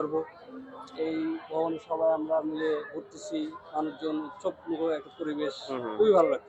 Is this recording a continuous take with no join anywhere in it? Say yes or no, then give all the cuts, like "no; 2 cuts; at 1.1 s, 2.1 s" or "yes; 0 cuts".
yes; 0 cuts